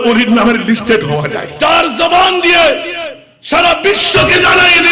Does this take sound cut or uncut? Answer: cut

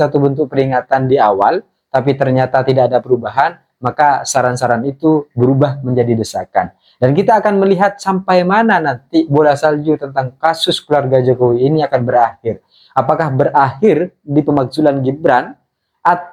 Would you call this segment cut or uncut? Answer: uncut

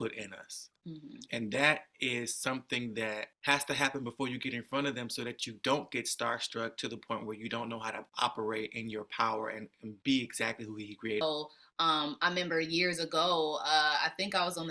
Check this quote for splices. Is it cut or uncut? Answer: cut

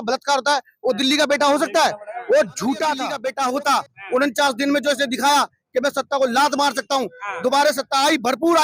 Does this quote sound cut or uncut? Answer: cut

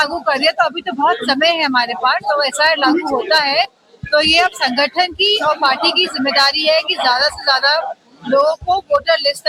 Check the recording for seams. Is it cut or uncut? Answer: uncut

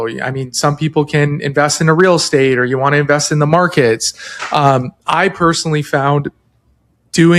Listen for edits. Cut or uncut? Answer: uncut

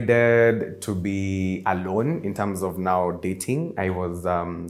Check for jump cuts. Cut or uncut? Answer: uncut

